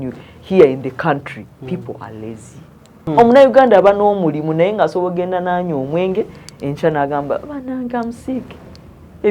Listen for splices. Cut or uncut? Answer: cut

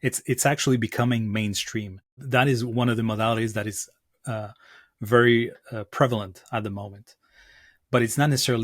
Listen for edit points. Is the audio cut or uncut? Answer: cut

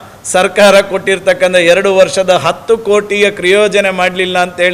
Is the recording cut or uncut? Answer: uncut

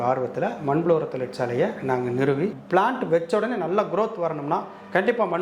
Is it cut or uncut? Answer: cut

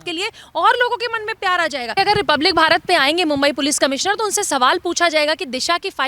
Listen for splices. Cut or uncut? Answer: cut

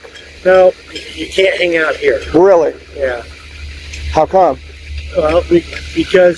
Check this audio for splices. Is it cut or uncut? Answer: uncut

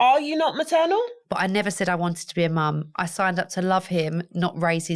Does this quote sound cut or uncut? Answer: cut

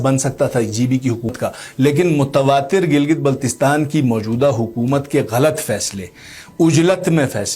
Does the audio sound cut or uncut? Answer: cut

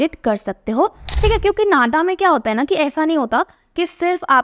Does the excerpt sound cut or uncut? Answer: cut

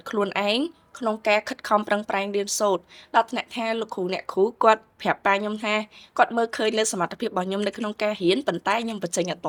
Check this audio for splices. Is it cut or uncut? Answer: uncut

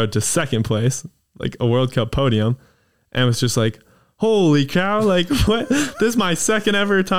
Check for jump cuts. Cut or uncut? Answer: uncut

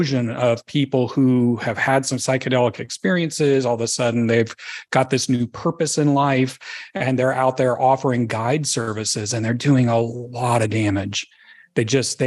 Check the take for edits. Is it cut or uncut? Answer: uncut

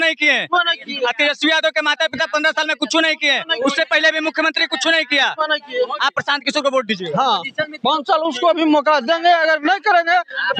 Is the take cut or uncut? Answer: uncut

